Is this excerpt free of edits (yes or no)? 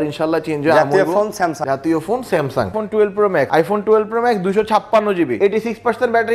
no